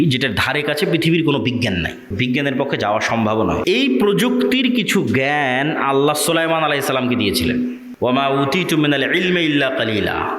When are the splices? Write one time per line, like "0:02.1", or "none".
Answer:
0:02.1
0:03.6
0:07.8

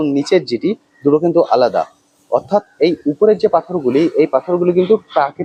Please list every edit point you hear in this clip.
none

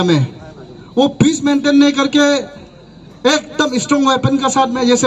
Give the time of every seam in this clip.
none

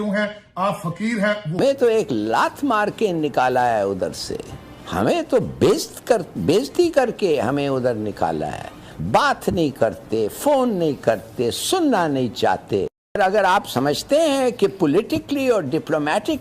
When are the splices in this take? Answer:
0:01.6
0:13.2

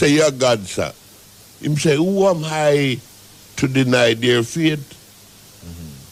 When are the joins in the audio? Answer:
none

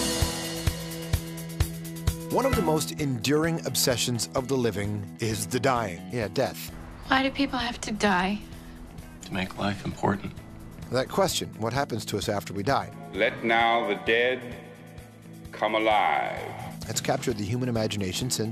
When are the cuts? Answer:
none

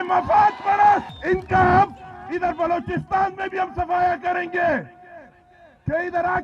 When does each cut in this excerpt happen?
0:01.1

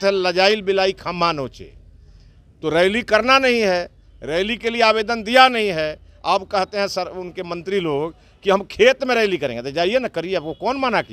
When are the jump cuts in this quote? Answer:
none

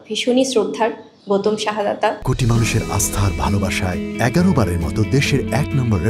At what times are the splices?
0:02.2

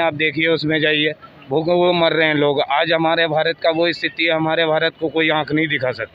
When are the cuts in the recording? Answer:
none

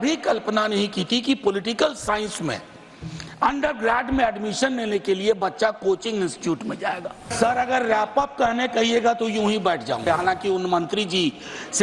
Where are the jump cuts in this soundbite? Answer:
0:07.3
0:10.0

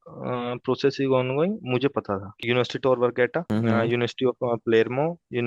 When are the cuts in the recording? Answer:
0:02.4
0:03.4

